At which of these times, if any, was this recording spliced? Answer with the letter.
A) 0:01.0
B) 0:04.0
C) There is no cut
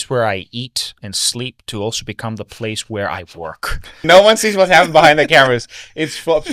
B